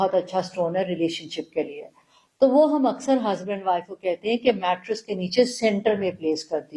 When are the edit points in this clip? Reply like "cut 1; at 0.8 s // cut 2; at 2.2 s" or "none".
none